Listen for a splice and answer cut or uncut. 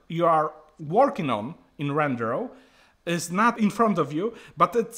uncut